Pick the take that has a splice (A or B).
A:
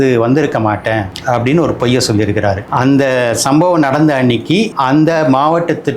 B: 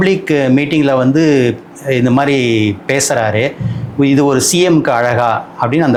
A